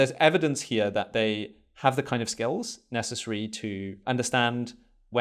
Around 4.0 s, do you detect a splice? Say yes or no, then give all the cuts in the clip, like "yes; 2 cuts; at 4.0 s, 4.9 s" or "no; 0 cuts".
yes; 1 cut; at 4.0 s